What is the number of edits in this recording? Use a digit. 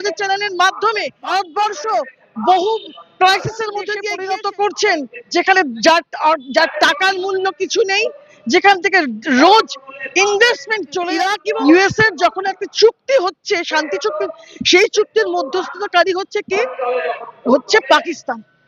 3